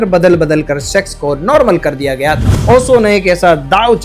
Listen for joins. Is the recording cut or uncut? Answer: cut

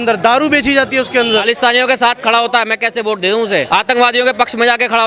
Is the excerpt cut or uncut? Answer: cut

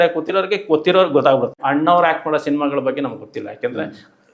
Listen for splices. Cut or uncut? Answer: cut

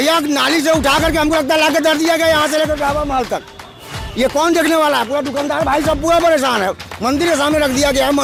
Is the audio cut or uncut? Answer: uncut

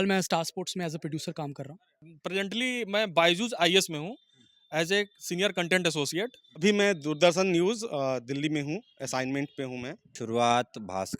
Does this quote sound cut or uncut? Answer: cut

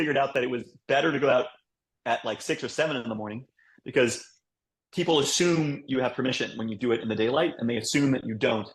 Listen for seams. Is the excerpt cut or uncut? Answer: uncut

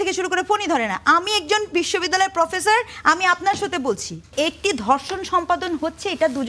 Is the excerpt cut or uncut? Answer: cut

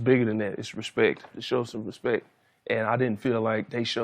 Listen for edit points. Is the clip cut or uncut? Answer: cut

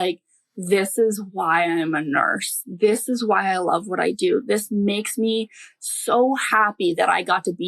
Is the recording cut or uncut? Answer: uncut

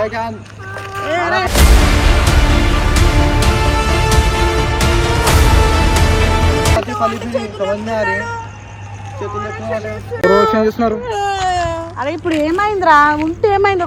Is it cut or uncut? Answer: uncut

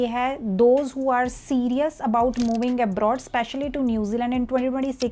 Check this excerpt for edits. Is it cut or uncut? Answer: uncut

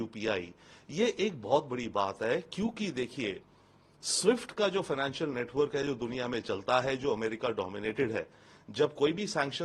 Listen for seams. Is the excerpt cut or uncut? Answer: uncut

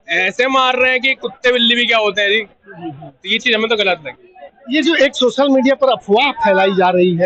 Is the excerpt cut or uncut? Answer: uncut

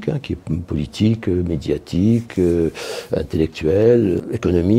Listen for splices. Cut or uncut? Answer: uncut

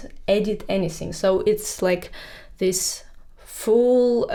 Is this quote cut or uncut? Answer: uncut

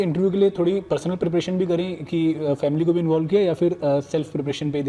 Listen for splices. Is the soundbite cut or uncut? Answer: uncut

